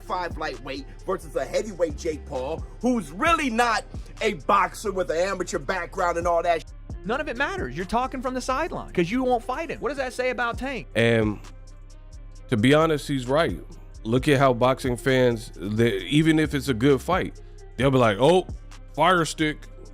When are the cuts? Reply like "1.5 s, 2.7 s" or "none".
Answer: 7.0 s, 10.7 s